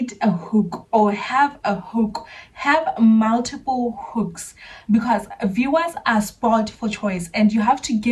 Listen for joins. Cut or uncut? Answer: uncut